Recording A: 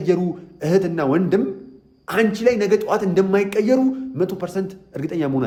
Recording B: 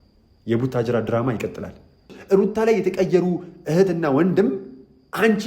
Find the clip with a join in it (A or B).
B